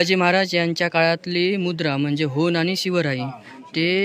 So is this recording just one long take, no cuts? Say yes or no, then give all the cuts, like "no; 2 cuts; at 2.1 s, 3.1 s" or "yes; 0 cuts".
yes; 0 cuts